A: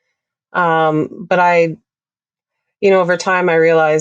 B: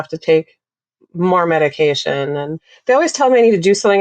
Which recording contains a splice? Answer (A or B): B